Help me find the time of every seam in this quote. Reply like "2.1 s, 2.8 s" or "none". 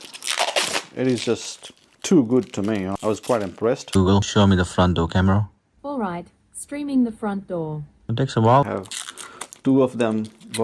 3.9 s, 8.7 s